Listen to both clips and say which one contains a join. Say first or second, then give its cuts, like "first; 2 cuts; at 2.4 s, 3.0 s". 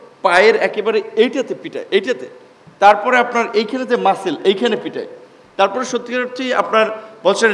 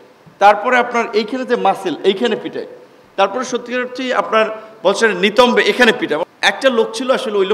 second; 1 cut; at 6.2 s